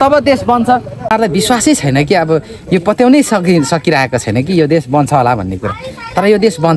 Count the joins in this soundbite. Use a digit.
1